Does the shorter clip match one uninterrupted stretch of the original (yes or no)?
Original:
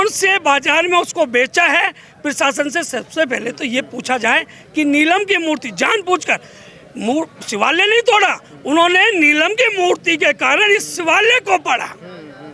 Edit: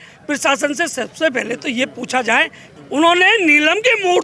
no